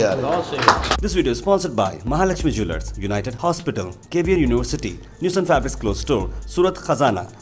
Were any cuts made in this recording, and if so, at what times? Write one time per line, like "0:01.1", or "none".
0:01.0